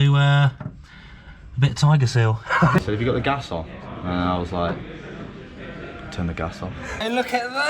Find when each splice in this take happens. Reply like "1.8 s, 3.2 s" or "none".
2.8 s, 7.0 s